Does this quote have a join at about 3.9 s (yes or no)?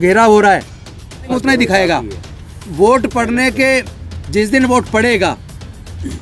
no